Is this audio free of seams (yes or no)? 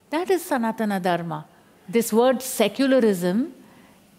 no